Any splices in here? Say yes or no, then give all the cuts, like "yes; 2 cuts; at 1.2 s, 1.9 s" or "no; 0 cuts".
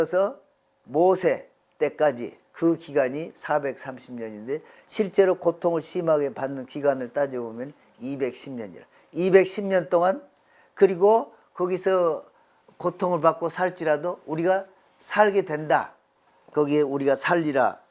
no; 0 cuts